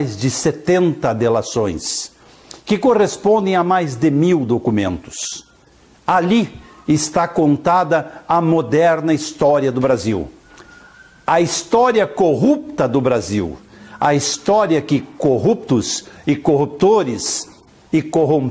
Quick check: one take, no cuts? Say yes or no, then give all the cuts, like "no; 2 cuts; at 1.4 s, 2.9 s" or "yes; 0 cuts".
no; 1 cut; at 7.6 s